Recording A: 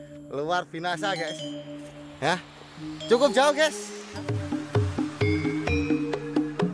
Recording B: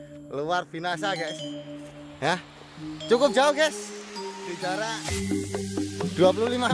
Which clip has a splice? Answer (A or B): A